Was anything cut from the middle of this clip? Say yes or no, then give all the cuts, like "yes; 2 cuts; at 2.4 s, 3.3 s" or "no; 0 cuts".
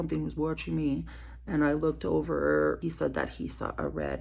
yes; 1 cut; at 2.8 s